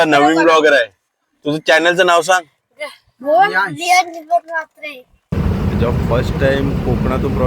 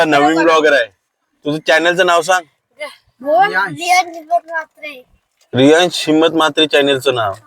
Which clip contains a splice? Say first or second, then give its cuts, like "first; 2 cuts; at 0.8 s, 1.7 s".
first; 1 cut; at 5.3 s